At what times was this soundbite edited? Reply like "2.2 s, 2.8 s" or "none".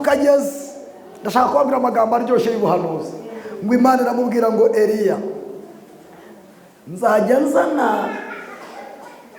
none